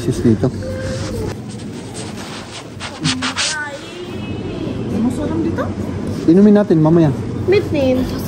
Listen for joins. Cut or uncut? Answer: uncut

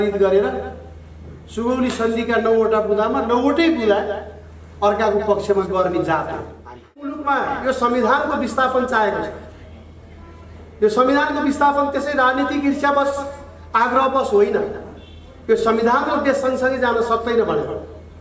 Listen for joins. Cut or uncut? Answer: cut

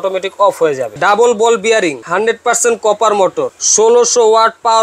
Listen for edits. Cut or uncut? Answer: cut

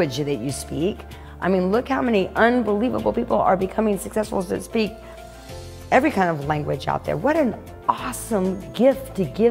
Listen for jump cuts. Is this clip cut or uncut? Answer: uncut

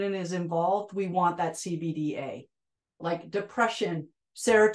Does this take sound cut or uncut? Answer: cut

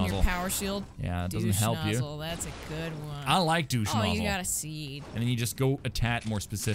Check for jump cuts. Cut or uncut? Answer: cut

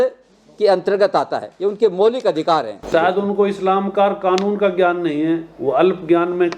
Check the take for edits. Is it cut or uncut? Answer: cut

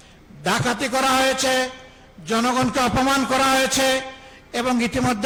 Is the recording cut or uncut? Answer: uncut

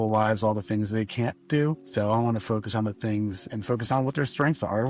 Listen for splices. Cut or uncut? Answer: cut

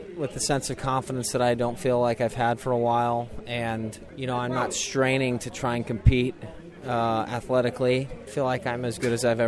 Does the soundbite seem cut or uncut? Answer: cut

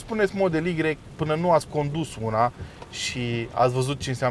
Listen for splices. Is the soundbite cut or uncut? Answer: uncut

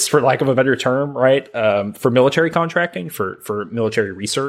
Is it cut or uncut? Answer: uncut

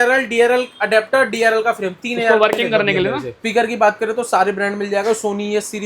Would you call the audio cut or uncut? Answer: cut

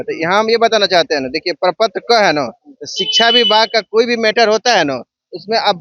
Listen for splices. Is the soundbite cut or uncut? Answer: uncut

